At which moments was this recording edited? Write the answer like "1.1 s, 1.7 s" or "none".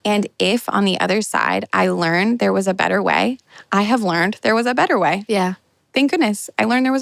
none

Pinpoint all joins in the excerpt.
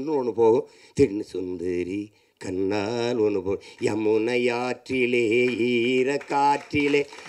none

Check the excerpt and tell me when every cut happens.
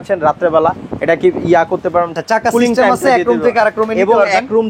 2.2 s

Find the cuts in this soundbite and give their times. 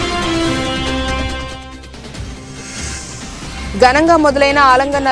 3.4 s

